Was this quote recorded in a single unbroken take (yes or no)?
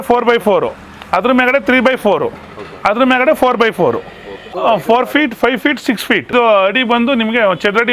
no